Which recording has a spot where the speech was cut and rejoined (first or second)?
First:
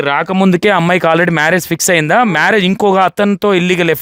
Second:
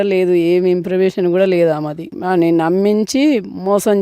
second